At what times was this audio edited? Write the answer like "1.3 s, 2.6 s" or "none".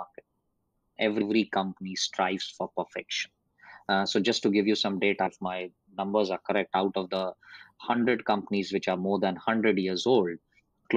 none